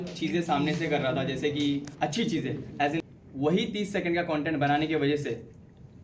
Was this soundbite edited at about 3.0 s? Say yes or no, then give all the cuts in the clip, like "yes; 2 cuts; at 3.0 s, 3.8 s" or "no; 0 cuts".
yes; 1 cut; at 3.0 s